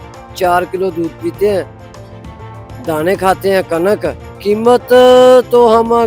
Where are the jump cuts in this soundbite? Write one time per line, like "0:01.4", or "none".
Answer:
0:04.3